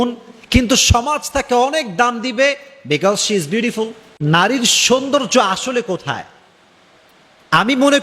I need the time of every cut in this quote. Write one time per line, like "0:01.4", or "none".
0:04.1